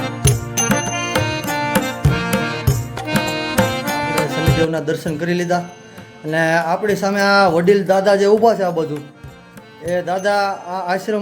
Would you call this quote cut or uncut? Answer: cut